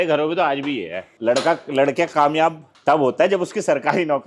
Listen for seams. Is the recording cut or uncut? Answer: cut